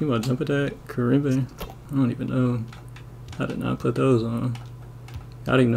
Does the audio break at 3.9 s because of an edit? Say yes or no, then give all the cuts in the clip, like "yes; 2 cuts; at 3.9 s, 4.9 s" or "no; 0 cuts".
no; 1 cut; at 1.8 s